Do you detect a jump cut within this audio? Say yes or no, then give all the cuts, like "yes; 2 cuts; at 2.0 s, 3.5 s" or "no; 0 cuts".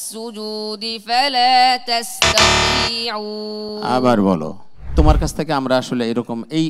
yes; 1 cut; at 4.9 s